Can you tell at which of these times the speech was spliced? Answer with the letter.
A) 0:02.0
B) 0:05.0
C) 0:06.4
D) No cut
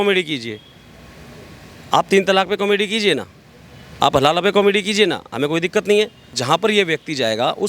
C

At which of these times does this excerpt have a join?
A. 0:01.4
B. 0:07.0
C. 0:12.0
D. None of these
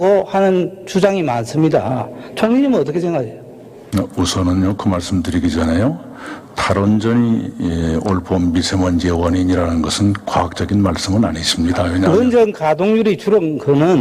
C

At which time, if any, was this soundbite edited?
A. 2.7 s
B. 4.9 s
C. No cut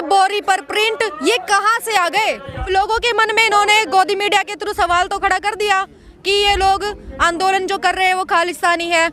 A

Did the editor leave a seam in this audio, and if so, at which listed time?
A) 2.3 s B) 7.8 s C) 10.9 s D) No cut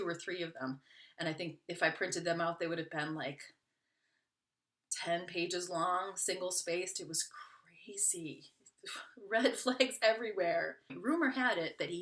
C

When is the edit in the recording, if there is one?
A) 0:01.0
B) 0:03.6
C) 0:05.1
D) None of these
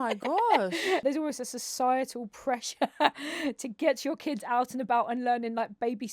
A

